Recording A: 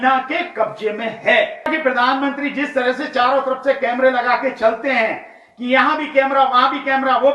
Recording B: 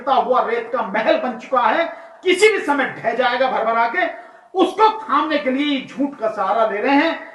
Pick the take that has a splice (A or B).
A